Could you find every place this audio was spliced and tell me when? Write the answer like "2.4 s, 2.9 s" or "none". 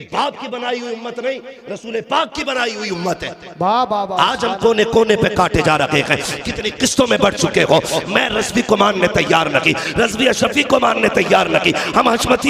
none